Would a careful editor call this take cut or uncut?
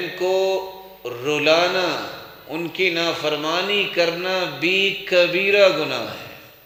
uncut